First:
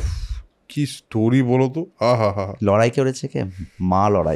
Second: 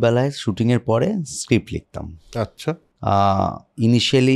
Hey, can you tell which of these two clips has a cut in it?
second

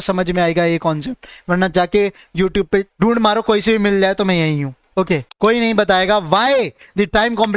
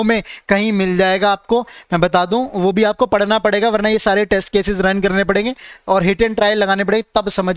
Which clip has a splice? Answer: first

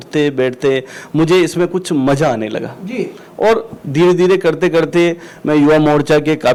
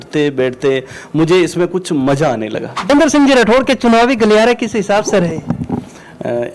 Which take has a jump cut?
second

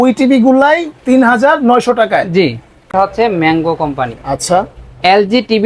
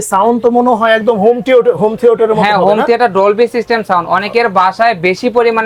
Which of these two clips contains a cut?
first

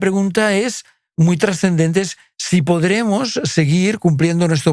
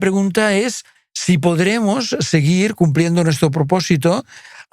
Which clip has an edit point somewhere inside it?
second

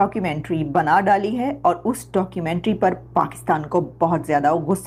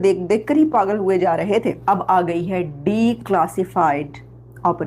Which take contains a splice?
second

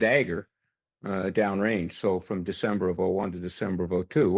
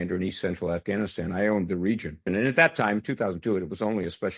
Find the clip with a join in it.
second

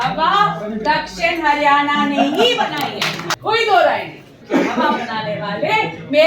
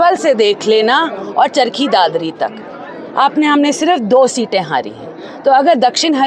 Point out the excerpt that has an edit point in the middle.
first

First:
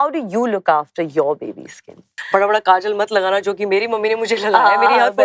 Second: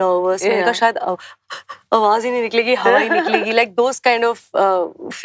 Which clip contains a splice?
first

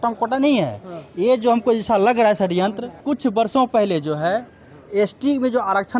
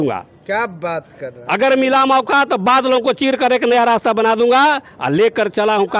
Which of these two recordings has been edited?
first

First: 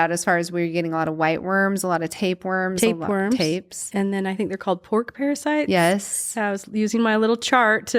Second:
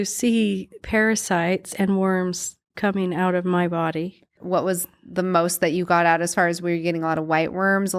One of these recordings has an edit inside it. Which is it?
second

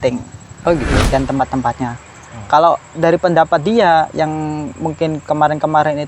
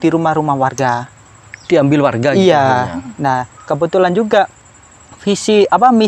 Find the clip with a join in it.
first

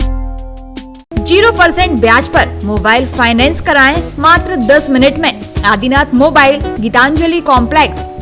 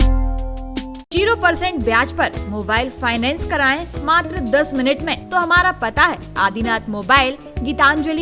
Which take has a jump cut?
second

